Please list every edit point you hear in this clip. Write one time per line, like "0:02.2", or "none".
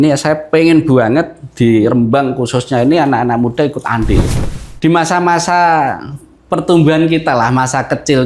0:04.3